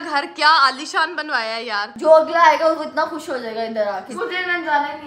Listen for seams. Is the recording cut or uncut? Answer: cut